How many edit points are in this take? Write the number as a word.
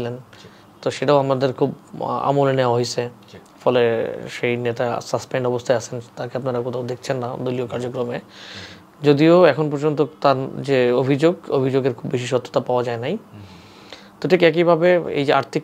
zero